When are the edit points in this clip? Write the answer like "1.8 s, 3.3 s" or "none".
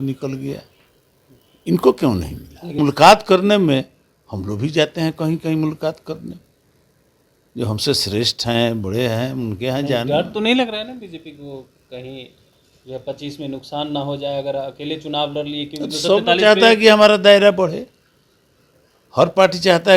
2.8 s